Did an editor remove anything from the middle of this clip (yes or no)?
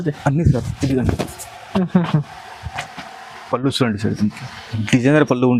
no